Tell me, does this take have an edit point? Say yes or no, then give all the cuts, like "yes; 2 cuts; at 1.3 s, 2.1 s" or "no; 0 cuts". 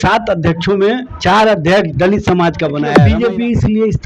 yes; 2 cuts; at 1.1 s, 2.9 s